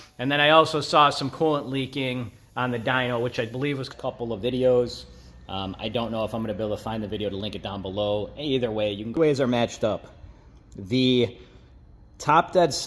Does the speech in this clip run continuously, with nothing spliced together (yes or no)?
no